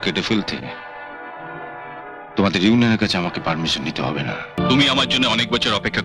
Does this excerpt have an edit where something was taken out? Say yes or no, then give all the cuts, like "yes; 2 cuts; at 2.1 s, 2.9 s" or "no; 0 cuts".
yes; 1 cut; at 4.6 s